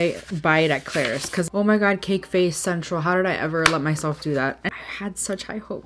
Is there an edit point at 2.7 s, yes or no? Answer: no